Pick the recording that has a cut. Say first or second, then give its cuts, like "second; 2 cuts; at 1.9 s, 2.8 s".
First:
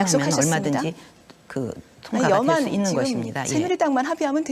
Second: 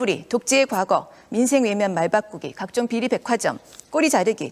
first; 1 cut; at 2.7 s